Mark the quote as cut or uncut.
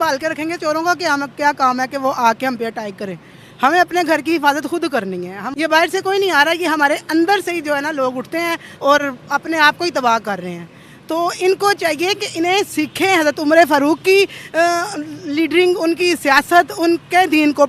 cut